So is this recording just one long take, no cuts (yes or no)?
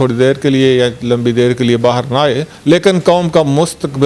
no